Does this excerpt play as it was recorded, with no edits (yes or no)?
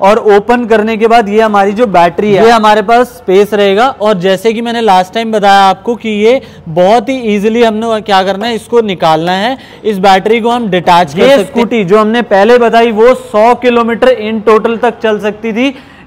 no